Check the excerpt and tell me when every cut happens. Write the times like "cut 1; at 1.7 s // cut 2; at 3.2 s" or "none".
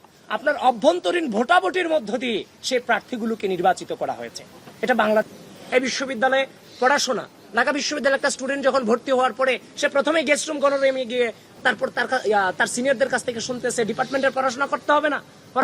cut 1; at 5.3 s